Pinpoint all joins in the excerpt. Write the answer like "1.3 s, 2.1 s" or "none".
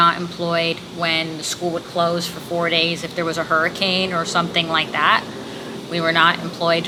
none